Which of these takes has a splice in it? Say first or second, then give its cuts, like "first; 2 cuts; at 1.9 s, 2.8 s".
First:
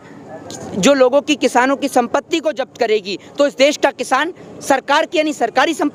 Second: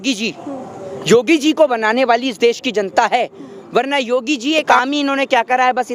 second; 1 cut; at 4.7 s